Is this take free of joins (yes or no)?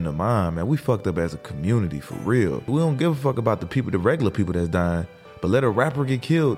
no